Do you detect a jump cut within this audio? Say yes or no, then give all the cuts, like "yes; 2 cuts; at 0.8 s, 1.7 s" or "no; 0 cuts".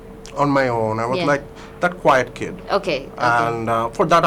no; 0 cuts